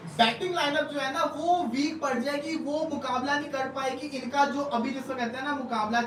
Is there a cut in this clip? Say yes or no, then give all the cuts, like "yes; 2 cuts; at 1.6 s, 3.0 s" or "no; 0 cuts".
no; 0 cuts